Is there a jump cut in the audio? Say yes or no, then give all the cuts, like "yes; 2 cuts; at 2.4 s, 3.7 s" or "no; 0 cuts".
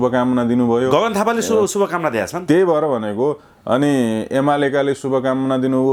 no; 0 cuts